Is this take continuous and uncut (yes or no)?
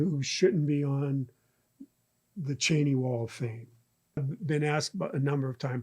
no